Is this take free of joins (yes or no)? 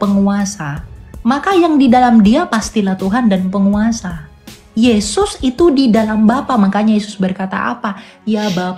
yes